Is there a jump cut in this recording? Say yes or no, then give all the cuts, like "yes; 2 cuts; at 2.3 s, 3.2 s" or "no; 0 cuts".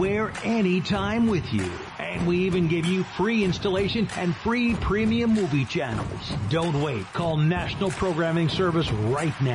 no; 0 cuts